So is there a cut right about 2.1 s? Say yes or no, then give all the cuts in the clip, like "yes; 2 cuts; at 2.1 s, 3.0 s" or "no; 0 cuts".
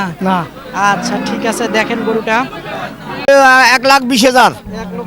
no; 1 cut; at 3.3 s